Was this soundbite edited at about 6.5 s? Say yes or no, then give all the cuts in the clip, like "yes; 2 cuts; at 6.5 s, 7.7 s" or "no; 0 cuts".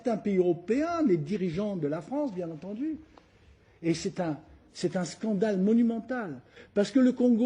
yes; 1 cut; at 6.5 s